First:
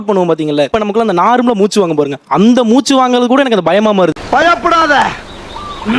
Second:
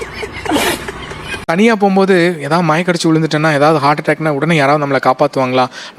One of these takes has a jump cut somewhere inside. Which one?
second; 1 cut; at 1.4 s

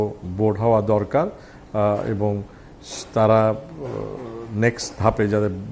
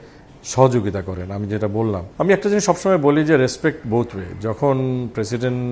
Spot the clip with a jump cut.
second; 1 cut; at 2.1 s

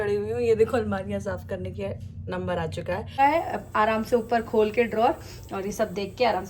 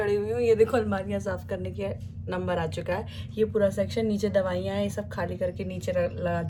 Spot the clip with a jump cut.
first; 1 cut; at 3.2 s

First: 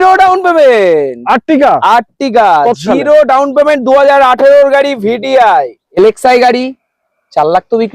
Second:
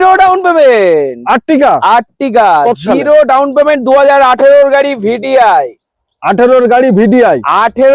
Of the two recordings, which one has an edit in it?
first; 1 cut; at 6.0 s

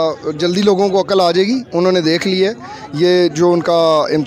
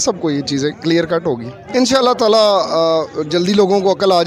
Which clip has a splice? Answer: second; 1 cut; at 1.5 s

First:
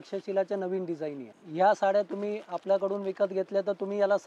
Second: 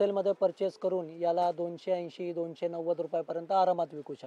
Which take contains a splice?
first; 1 cut; at 1.4 s

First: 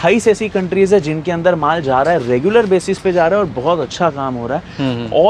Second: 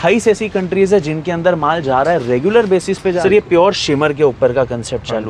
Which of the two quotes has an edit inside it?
second; 1 cut; at 3.2 s

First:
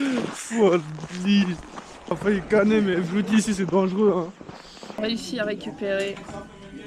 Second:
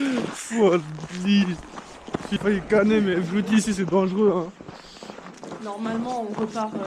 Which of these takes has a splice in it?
first; 2 cuts; at 2.1 s, 5.0 s

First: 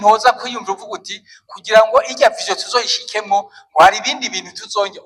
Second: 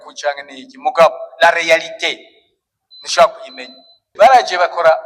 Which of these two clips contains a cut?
second; 1 cut; at 4.1 s

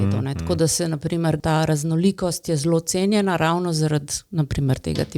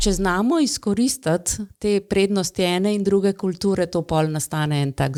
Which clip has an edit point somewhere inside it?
first; 1 cut; at 1.4 s

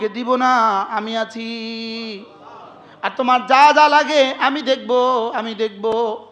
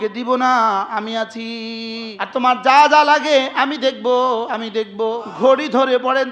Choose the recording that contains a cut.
second; 2 cuts; at 2.4 s, 5.1 s

